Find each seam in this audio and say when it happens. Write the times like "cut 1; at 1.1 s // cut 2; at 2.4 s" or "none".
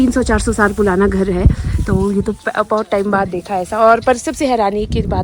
none